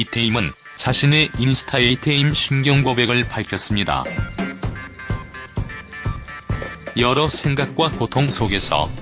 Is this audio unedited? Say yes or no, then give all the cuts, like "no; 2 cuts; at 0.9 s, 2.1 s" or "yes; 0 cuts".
no; 1 cut; at 1.8 s